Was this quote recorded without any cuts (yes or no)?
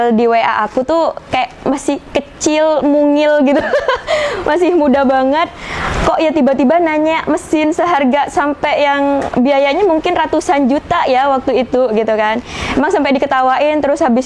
yes